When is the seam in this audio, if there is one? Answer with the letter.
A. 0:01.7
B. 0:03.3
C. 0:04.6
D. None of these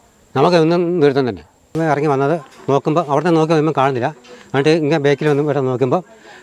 A